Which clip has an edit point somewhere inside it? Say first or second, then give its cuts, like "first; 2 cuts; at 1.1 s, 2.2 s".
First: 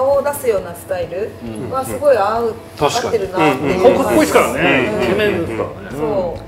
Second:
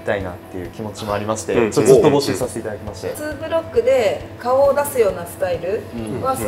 second; 1 cut; at 3.2 s